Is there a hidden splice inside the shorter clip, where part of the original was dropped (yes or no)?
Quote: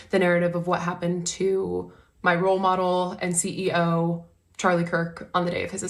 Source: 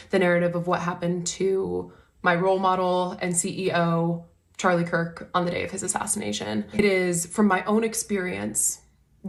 no